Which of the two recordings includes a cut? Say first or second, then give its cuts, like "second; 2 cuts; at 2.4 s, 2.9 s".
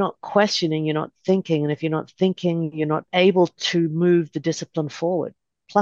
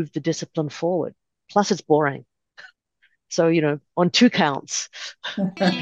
first; 1 cut; at 3.1 s